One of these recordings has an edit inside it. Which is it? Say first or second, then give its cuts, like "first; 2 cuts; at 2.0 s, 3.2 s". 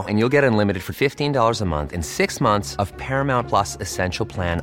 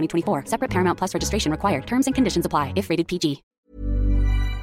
second; 1 cut; at 3.5 s